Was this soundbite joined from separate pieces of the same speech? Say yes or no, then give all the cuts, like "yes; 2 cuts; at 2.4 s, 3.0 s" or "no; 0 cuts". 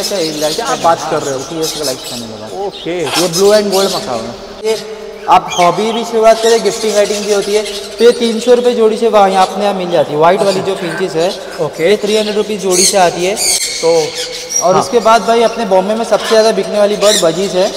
yes; 2 cuts; at 4.7 s, 13.6 s